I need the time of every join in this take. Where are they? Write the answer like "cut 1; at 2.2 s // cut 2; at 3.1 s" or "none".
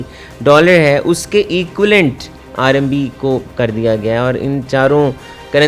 none